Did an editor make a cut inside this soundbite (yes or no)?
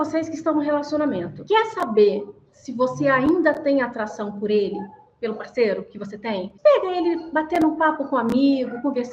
yes